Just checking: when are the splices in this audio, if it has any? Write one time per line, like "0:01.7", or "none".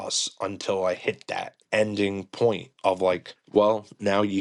none

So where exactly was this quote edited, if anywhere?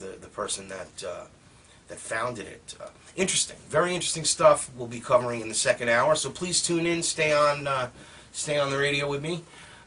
0:05.5

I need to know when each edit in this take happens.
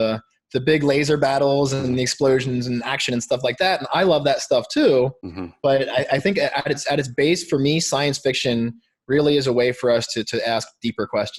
none

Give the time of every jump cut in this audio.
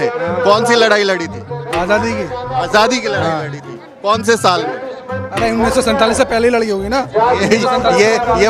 none

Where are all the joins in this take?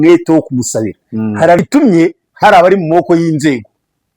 0:01.6

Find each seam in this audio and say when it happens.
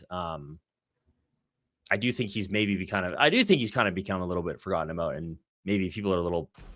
none

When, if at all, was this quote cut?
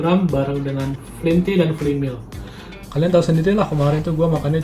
0:02.4

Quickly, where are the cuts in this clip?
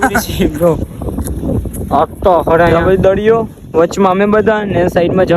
0:02.7

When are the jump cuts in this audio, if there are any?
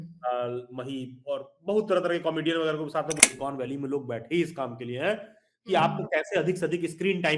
0:03.2

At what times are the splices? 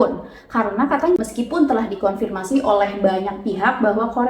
0:01.2

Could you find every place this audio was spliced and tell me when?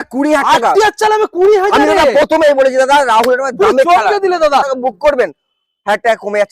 0:04.7

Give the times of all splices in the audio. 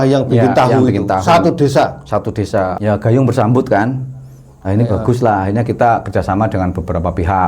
0:02.7

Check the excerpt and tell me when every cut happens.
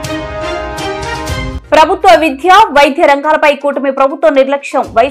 0:01.5

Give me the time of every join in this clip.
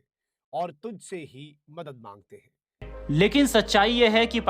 0:02.9

